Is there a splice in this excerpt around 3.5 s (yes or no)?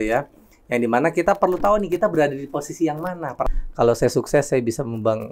yes